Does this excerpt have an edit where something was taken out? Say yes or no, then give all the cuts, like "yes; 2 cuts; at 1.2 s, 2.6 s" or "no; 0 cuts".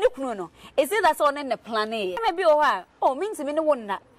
yes; 1 cut; at 2.2 s